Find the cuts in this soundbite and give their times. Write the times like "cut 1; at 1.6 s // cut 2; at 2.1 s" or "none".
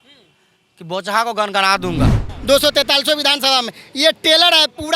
cut 1; at 2.3 s